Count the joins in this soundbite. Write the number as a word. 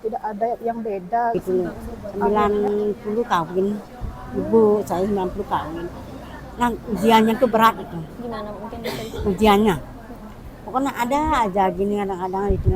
one